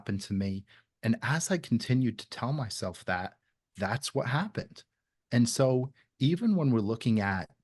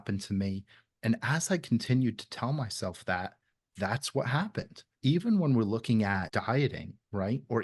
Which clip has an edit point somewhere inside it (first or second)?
second